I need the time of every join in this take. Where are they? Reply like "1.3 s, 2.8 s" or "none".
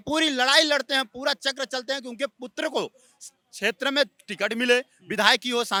none